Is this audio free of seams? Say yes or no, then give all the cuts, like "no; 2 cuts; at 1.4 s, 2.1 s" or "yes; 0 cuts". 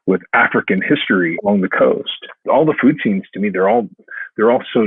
no; 2 cuts; at 1.4 s, 2.3 s